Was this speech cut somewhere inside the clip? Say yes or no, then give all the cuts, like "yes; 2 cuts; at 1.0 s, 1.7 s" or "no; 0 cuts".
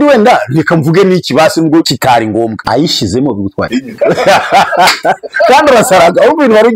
yes; 2 cuts; at 2.1 s, 3.8 s